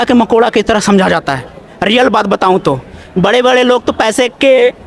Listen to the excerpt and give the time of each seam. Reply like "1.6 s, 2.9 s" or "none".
none